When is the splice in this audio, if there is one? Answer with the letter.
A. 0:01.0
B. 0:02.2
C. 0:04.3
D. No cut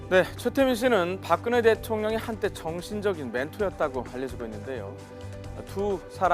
D